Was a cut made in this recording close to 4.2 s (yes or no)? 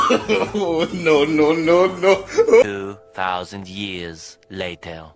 no